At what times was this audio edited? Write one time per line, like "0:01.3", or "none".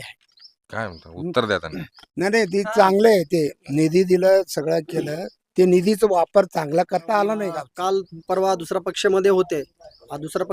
0:07.6